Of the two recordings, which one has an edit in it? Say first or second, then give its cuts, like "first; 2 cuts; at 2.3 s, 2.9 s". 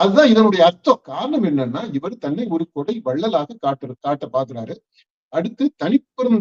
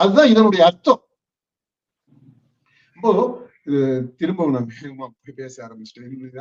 first; 1 cut; at 1.2 s